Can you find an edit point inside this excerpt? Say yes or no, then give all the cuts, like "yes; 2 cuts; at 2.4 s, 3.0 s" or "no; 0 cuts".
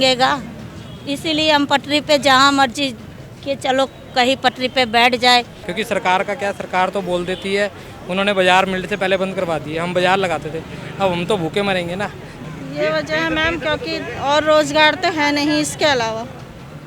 yes; 2 cuts; at 5.6 s, 12.3 s